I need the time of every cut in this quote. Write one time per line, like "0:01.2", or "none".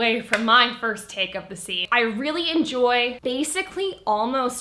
0:01.8
0:03.2